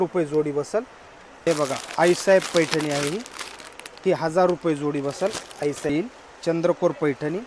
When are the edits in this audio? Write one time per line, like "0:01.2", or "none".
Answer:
0:01.5
0:05.9